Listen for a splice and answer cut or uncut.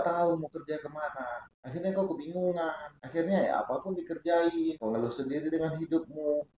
cut